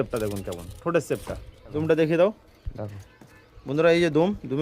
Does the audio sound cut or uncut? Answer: cut